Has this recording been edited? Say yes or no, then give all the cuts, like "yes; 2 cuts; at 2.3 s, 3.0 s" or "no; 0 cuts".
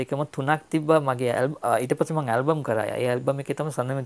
no; 0 cuts